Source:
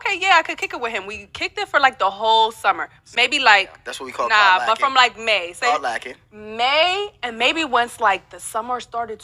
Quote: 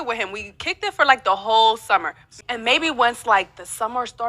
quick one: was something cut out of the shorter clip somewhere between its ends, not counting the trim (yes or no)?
yes